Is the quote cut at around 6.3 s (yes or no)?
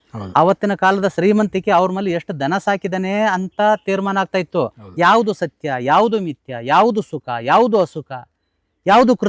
no